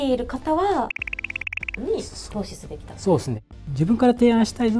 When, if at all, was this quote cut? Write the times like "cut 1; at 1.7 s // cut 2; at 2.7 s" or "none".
cut 1; at 1.1 s // cut 2; at 3.5 s